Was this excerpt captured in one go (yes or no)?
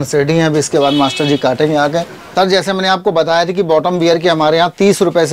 no